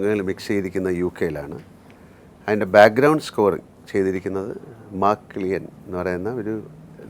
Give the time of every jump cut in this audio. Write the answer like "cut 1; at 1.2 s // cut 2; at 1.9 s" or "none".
none